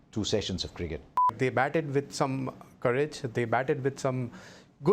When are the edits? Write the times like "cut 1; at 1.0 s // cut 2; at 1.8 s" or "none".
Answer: cut 1; at 1.3 s